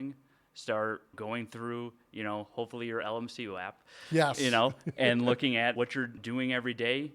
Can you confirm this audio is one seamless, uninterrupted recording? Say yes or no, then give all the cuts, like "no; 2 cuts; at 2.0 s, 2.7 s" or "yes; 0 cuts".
no; 2 cuts; at 1.2 s, 5.8 s